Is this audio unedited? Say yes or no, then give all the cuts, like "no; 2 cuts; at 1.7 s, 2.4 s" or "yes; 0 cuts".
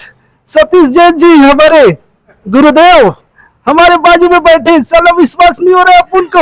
yes; 0 cuts